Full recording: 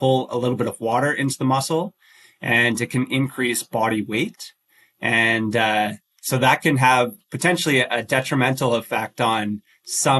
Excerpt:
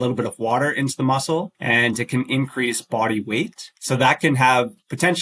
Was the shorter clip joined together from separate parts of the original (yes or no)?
yes